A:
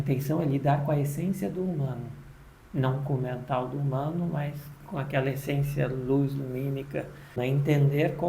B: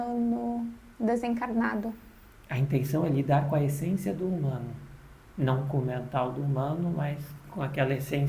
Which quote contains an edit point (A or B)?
A